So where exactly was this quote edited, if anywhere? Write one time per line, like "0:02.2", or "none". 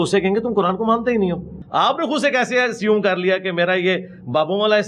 0:01.6

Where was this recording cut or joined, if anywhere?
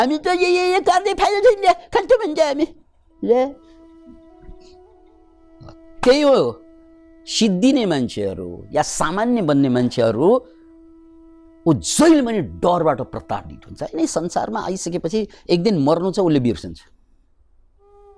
none

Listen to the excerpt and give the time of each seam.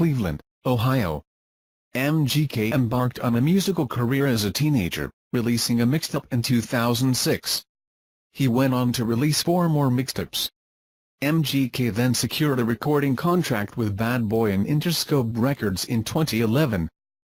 none

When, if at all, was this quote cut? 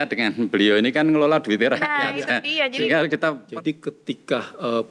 0:03.4

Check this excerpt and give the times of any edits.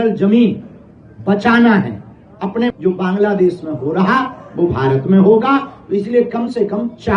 0:02.7

